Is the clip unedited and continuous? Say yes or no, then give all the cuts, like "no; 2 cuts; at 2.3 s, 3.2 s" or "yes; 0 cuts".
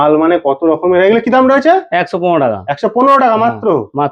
yes; 0 cuts